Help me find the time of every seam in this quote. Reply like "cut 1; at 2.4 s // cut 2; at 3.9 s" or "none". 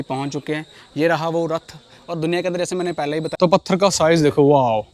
cut 1; at 3.3 s